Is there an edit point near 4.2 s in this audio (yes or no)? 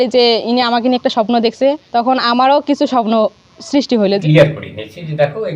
yes